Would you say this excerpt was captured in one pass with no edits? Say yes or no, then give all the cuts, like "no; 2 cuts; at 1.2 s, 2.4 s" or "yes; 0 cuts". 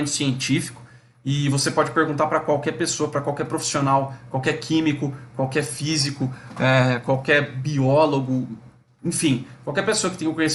yes; 0 cuts